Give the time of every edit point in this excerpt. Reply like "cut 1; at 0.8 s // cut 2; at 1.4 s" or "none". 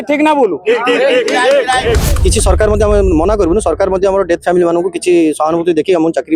cut 1; at 2.1 s